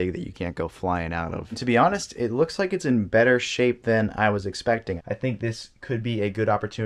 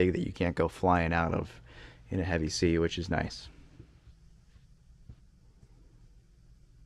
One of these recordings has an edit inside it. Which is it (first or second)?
first